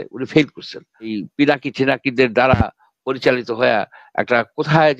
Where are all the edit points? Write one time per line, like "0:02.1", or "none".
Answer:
0:01.2